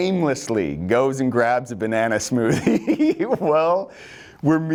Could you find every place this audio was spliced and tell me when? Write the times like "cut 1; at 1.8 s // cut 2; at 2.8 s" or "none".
none